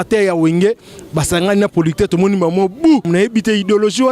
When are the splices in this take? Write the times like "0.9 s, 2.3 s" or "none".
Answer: 3.1 s